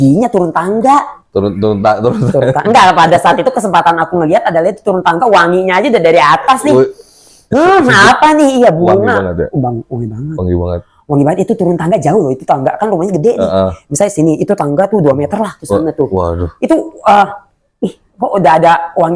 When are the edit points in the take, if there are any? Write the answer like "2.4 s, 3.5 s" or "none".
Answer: none